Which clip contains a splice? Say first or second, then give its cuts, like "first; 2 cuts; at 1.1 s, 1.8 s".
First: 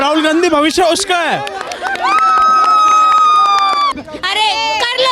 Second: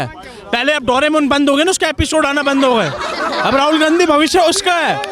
first; 1 cut; at 4.0 s